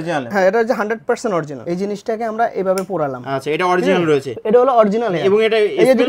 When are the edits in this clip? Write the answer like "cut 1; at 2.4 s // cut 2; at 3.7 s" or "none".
none

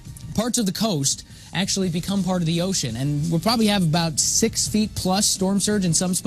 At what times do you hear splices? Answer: none

